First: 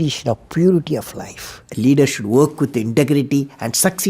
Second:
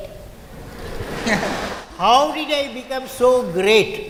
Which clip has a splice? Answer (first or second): first